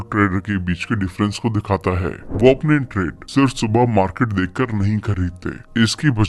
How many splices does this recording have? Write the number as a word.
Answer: one